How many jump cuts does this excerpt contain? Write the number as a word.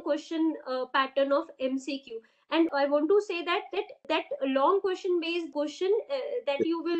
three